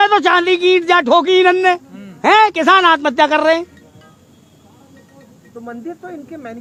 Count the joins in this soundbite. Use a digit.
0